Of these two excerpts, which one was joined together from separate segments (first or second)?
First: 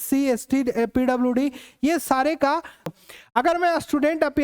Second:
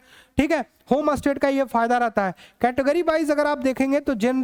first